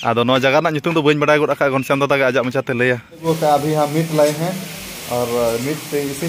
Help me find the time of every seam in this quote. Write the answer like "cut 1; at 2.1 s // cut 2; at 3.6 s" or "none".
cut 1; at 3.2 s